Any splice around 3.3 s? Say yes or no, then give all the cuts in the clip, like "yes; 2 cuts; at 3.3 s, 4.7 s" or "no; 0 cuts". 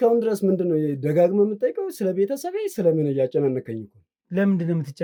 no; 0 cuts